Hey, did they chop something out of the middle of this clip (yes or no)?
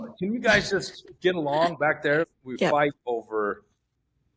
yes